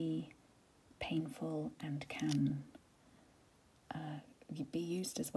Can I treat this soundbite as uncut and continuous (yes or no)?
yes